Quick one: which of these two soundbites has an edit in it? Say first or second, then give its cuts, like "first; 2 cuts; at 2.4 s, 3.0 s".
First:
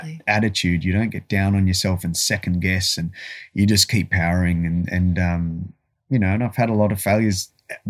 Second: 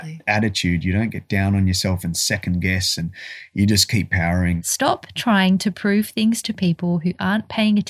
second; 1 cut; at 4.6 s